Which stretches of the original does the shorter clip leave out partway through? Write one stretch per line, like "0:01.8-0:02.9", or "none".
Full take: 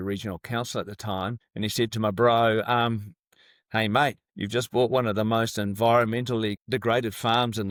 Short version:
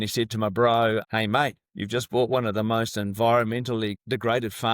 0:02.7-0:03.6